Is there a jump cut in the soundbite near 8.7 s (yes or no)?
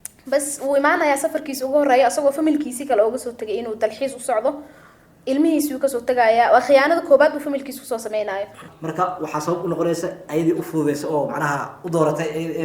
yes